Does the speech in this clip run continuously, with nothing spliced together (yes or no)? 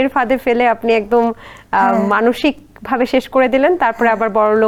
yes